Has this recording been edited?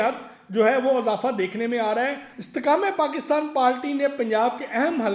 yes; 1 cut; at 2.3 s

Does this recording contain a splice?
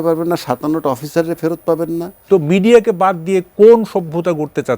yes; 1 cut; at 2.2 s

